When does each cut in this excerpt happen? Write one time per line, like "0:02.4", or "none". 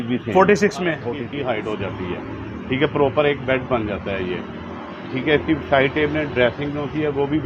0:01.2